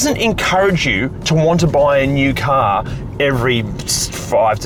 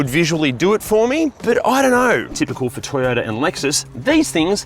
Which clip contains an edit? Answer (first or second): second